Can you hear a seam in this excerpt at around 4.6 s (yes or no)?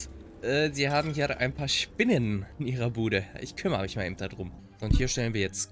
yes